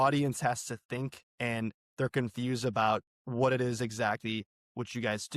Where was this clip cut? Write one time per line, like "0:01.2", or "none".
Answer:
0:01.2